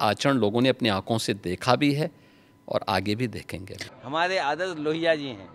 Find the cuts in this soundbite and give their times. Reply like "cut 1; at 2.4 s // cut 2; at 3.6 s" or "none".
cut 1; at 3.9 s